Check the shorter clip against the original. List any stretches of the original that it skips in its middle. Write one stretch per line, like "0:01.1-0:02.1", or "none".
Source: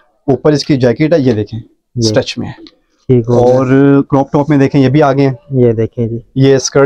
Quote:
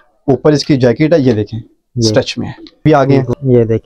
0:02.8-0:04.9